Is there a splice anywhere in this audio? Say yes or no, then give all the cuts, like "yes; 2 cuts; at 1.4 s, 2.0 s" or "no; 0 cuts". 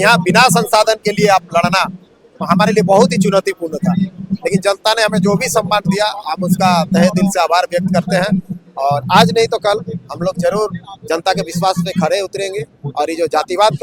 no; 0 cuts